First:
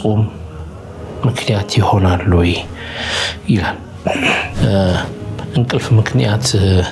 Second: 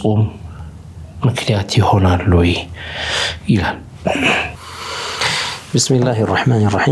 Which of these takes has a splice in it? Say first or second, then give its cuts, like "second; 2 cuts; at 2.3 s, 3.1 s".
first; 1 cut; at 4.5 s